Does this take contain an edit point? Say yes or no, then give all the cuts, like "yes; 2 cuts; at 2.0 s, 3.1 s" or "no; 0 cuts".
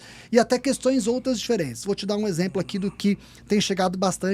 no; 0 cuts